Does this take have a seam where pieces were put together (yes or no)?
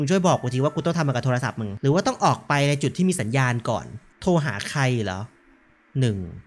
no